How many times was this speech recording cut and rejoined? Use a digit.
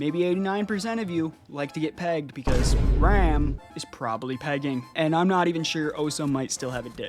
1